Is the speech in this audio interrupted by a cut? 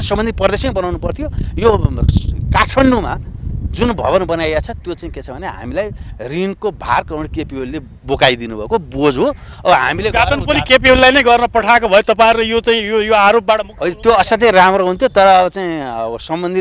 no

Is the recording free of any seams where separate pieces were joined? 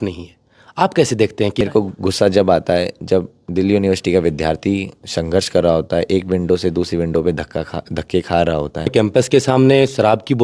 no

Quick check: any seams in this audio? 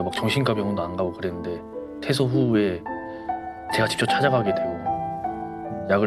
no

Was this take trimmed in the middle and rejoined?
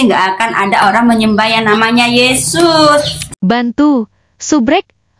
yes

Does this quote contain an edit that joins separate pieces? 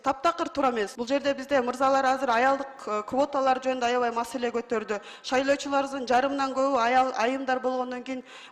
yes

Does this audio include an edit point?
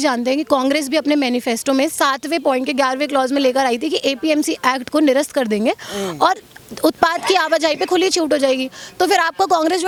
no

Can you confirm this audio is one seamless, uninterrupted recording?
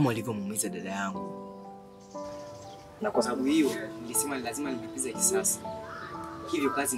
yes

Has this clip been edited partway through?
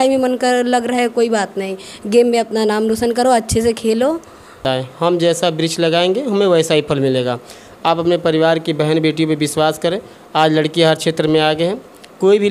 yes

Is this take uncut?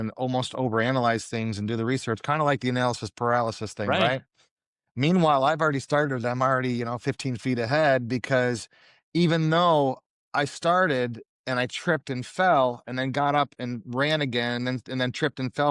yes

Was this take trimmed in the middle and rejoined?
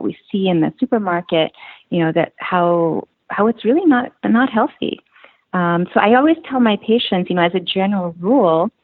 no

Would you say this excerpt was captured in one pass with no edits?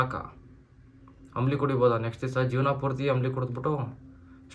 yes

